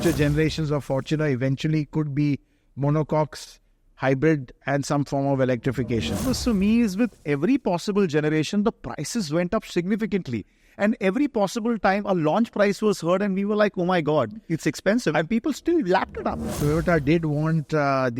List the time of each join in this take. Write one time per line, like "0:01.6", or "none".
0:06.2
0:16.4